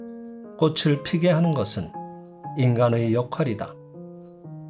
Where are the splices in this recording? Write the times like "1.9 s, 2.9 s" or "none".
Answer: 3.8 s